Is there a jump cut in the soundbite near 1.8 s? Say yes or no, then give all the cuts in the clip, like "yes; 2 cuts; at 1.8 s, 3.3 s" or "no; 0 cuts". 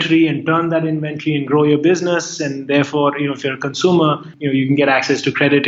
no; 1 cut; at 4.3 s